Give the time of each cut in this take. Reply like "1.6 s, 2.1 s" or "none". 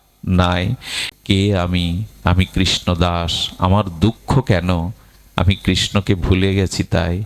1.0 s

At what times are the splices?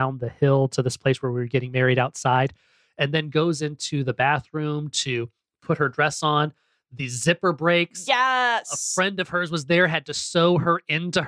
none

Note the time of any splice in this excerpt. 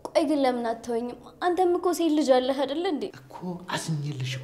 3.3 s

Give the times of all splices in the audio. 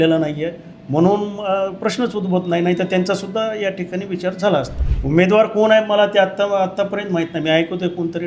4.8 s

